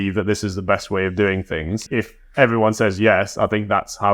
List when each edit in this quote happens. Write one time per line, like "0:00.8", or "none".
0:01.8